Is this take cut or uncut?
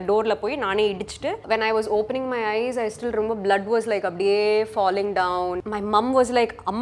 cut